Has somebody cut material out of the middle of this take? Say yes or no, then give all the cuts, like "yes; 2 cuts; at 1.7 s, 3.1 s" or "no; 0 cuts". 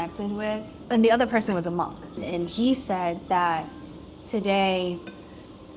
yes; 2 cuts; at 0.9 s, 2.1 s